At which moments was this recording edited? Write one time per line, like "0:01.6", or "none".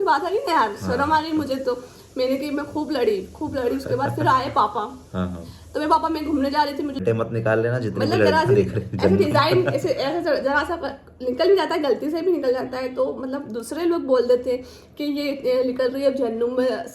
0:07.0